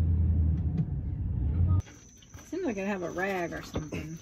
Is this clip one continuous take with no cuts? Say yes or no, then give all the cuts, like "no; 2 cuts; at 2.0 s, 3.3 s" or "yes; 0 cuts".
no; 1 cut; at 1.8 s